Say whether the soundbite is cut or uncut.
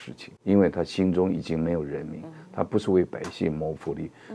uncut